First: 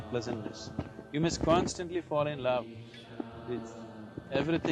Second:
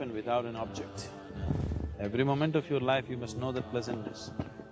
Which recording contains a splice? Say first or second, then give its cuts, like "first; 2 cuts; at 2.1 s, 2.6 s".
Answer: second; 1 cut; at 1.8 s